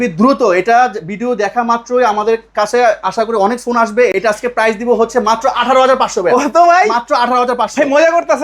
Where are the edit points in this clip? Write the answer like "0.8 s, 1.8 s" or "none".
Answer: 4.1 s